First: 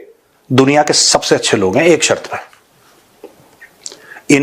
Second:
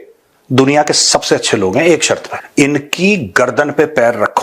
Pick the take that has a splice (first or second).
second